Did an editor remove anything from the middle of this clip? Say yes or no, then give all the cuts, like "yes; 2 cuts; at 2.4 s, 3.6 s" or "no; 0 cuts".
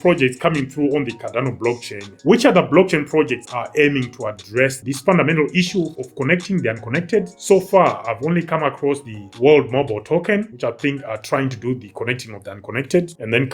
yes; 1 cut; at 2.2 s